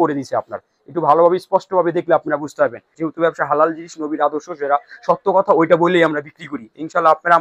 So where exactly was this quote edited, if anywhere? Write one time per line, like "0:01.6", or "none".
0:02.9